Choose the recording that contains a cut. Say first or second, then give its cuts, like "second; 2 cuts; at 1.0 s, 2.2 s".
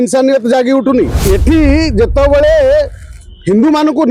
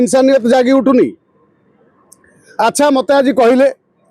first; 1 cut; at 1.2 s